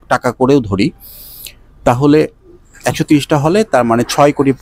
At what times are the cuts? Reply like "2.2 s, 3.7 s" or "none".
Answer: none